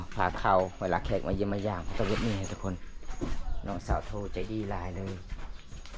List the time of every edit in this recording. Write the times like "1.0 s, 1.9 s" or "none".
none